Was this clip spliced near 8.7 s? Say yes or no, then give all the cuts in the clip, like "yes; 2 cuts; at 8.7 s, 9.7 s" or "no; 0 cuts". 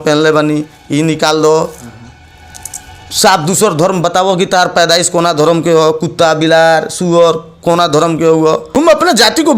yes; 1 cut; at 8.7 s